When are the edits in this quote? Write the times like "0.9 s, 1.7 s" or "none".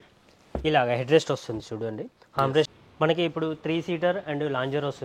2.7 s